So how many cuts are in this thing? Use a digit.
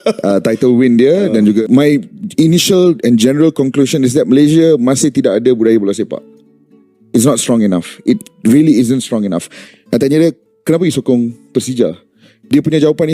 2